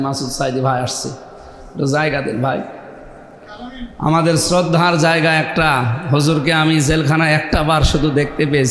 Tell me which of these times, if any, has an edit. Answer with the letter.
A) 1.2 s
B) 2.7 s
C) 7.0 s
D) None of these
D